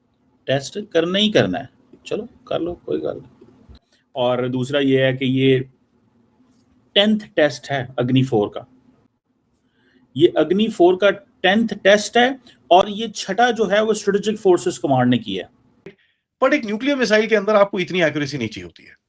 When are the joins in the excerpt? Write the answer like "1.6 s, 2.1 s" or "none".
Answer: 3.8 s, 16.0 s